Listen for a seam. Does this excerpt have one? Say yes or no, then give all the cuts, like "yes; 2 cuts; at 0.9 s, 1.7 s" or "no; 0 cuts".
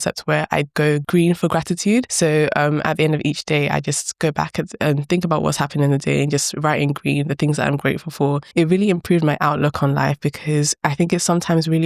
yes; 3 cuts; at 1.0 s, 2.1 s, 8.4 s